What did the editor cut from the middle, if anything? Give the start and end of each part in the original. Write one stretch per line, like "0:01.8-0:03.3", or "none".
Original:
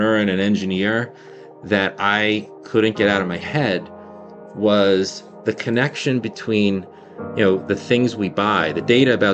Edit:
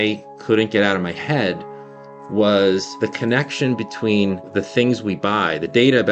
0:05.2-0:05.4
0:06.9-0:07.6